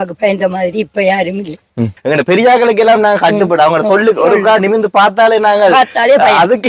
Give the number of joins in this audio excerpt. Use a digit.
1